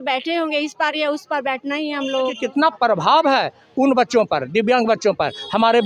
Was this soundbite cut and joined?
yes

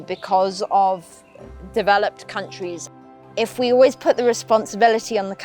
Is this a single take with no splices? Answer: no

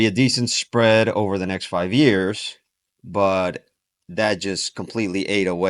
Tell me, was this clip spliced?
no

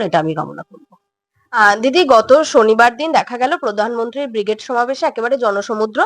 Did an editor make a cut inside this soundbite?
no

